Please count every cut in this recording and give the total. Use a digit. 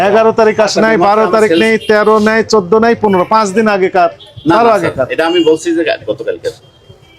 0